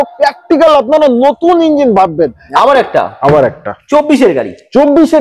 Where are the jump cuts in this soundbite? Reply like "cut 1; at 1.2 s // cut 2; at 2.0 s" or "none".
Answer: cut 1; at 2.4 s